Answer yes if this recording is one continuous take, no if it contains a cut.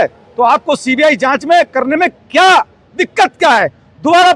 yes